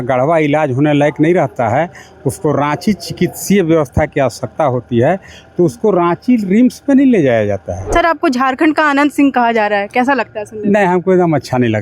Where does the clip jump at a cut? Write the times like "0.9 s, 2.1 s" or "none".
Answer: 7.9 s